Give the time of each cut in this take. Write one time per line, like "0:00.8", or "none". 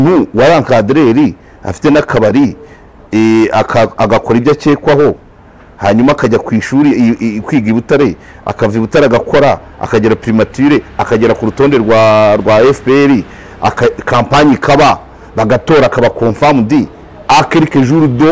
none